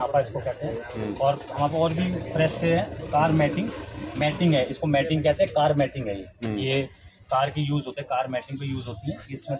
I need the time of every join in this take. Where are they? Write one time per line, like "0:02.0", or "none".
none